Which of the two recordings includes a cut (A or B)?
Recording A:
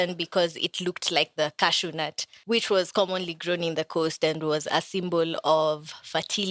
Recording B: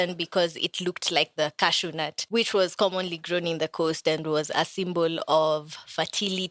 B